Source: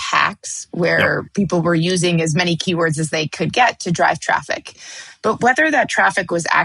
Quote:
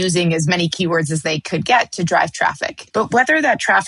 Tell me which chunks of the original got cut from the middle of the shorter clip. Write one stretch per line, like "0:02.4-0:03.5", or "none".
0:04.6-0:05.0